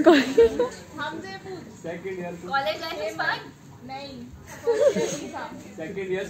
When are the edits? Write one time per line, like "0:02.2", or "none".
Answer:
none